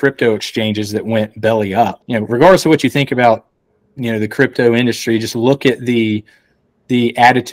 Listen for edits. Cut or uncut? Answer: cut